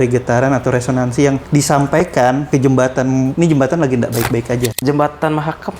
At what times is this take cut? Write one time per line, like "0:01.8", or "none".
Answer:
0:01.4
0:02.4
0:03.3
0:04.8

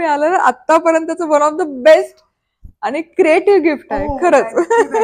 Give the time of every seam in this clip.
none

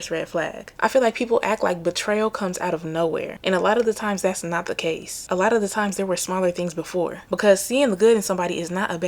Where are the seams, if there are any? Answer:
0:07.2

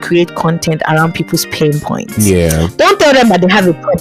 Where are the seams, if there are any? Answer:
none

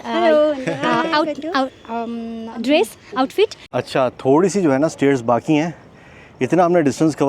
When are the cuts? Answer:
0:03.6

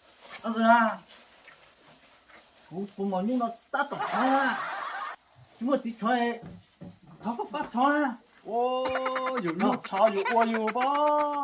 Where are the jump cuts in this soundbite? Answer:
none

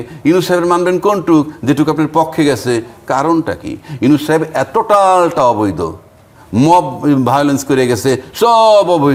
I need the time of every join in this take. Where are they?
none

